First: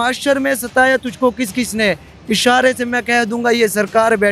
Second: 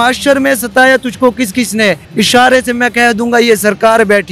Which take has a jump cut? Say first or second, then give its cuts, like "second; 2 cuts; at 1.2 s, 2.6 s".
second; 1 cut; at 2.0 s